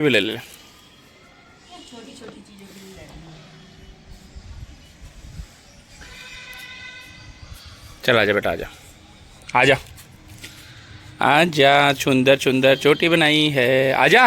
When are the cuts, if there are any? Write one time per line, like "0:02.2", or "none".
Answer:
0:12.8